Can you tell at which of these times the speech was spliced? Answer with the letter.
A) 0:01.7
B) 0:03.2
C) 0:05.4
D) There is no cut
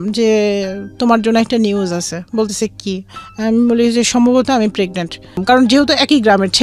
C